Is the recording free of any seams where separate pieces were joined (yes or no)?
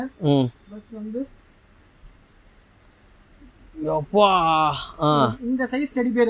yes